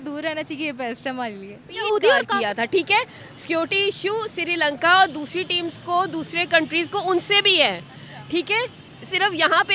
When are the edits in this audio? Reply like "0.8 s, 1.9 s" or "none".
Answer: 2.3 s